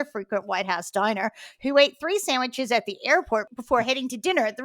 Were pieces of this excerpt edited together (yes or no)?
yes